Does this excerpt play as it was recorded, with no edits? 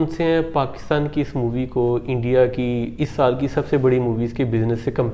yes; 0 cuts

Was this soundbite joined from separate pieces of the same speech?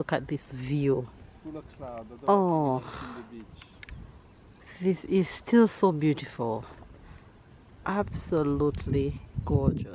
no; 0 cuts

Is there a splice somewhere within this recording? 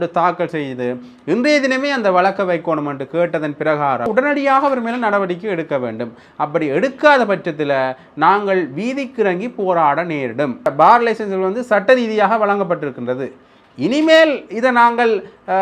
yes; 2 cuts; at 4.1 s, 10.7 s

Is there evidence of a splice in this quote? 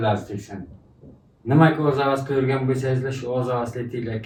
no; 0 cuts

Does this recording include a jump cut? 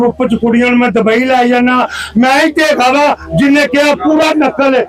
no; 0 cuts

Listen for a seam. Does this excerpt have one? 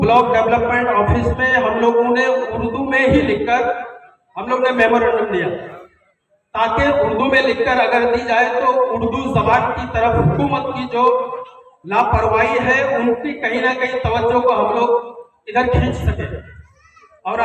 no; 0 cuts

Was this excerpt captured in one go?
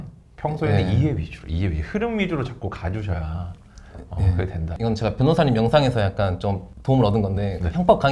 no; 2 cuts; at 4.7 s, 6.7 s

